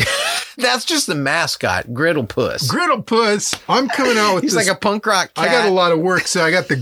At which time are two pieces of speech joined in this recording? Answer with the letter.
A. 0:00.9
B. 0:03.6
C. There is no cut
C